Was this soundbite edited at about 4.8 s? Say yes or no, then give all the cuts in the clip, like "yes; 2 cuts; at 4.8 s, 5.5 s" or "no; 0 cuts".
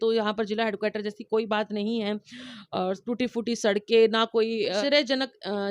yes; 1 cut; at 4.8 s